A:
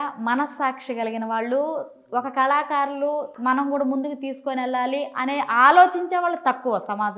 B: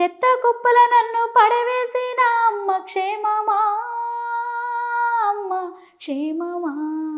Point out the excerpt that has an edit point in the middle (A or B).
A